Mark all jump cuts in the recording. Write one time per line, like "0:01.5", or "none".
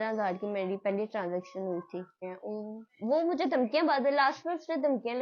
0:02.3